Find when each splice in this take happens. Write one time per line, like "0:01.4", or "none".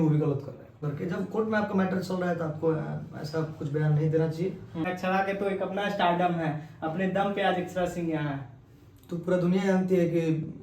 0:00.9
0:04.9